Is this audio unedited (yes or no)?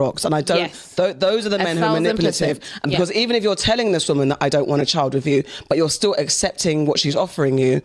yes